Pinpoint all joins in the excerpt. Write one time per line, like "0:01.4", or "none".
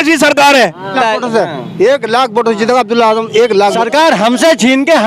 0:00.9
0:03.7